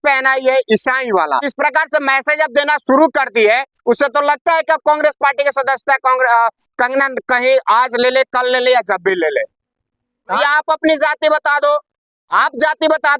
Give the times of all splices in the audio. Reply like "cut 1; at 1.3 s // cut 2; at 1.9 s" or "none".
cut 1; at 1.5 s // cut 2; at 10.4 s

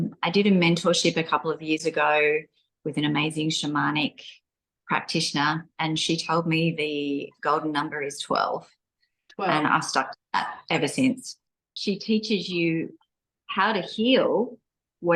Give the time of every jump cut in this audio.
cut 1; at 11.5 s

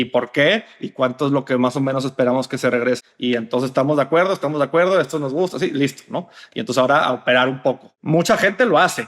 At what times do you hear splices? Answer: cut 1; at 3.0 s // cut 2; at 7.9 s

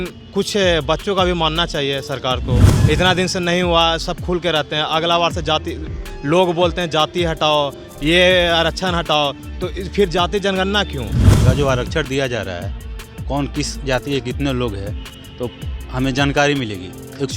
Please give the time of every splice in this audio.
cut 1; at 2.7 s // cut 2; at 11.4 s

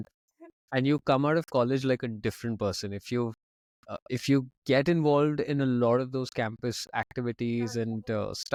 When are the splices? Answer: none

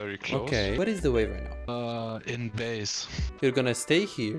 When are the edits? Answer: cut 1; at 0.8 s // cut 2; at 1.7 s // cut 3; at 3.2 s

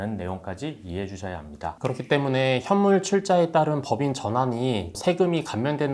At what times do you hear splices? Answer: none

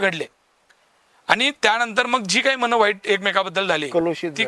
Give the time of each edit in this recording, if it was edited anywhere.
none

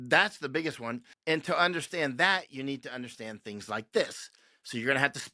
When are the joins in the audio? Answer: cut 1; at 1.1 s

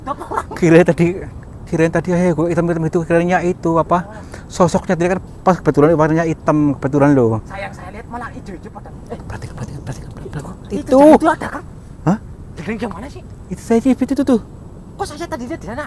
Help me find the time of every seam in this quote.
cut 1; at 8.9 s

